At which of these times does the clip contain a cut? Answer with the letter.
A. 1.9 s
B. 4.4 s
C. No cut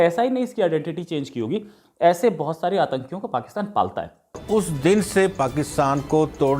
B